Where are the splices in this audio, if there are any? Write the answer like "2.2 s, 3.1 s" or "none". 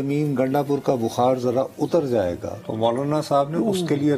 2.6 s